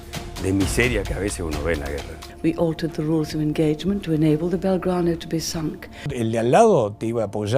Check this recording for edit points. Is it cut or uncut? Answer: cut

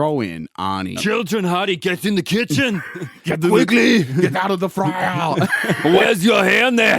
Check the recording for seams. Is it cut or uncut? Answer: cut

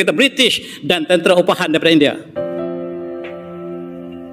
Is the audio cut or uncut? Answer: cut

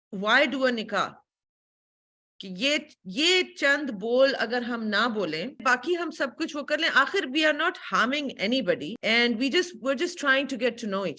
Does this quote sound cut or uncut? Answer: cut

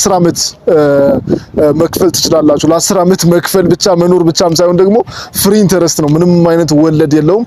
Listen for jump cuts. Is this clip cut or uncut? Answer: uncut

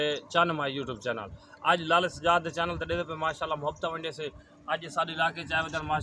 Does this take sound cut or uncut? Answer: uncut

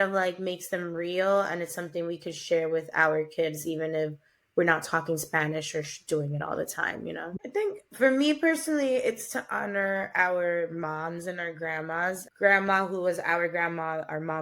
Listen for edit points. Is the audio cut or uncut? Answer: cut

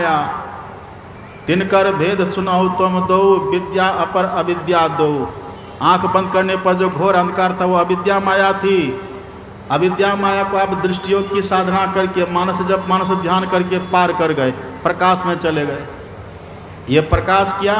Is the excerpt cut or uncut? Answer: uncut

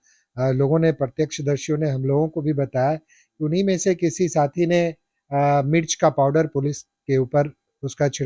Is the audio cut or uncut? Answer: uncut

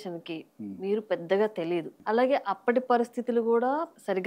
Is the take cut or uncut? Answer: cut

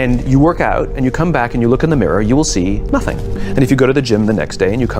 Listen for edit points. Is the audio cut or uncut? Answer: uncut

